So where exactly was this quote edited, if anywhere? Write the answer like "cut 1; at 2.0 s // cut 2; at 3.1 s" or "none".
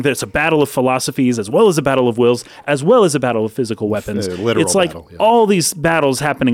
cut 1; at 2.6 s